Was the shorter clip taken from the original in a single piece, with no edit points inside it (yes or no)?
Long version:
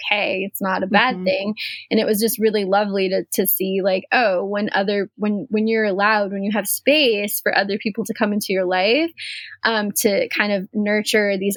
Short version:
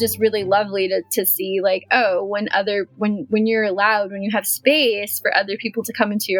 yes